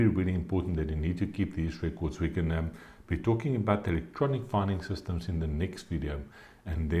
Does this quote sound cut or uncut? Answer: uncut